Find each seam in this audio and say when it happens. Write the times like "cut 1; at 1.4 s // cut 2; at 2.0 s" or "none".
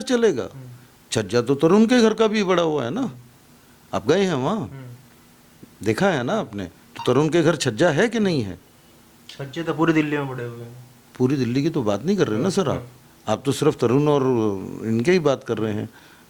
none